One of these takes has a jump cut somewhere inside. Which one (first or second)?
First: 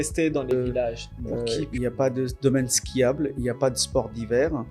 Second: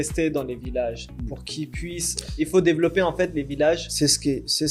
first